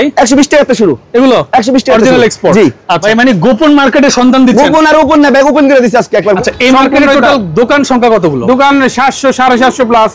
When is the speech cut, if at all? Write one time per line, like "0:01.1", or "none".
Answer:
0:02.9
0:06.4